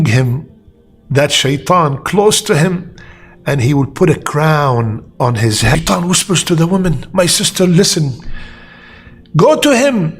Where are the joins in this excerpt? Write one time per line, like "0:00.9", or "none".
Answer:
0:05.7